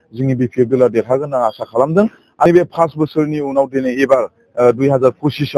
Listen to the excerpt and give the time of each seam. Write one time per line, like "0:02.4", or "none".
0:02.5